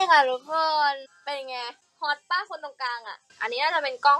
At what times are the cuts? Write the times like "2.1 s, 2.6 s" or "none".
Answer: 3.3 s

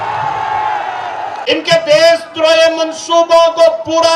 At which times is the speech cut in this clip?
1.3 s

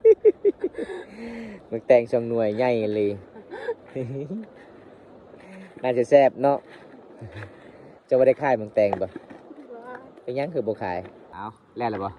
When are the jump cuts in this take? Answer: 11.2 s

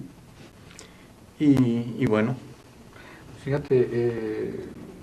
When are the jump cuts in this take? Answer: 3.9 s

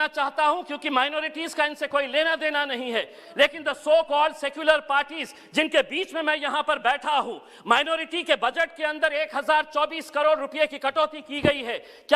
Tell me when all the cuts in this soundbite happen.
none

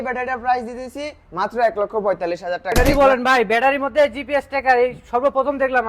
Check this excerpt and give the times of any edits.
2.7 s

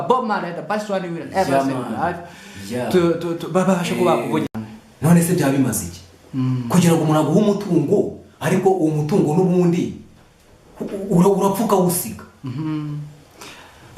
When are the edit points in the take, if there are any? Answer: 4.5 s

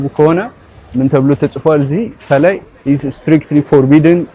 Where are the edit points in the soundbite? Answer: 2.7 s

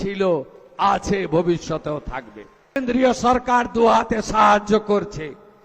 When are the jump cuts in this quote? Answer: 2.8 s

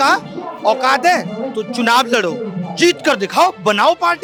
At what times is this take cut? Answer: none

